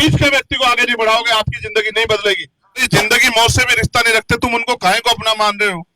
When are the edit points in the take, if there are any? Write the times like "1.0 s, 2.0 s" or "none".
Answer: 2.8 s